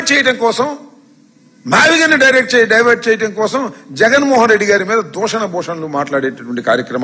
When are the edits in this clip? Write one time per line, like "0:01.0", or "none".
0:03.3